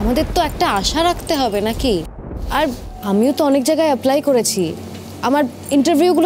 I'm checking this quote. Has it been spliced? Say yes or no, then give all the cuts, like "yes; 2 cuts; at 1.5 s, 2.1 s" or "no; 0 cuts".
yes; 1 cut; at 2.9 s